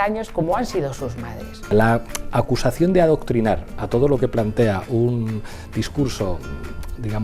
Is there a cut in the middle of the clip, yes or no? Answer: yes